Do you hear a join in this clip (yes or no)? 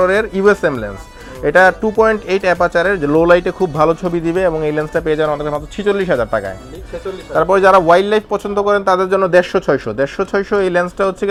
no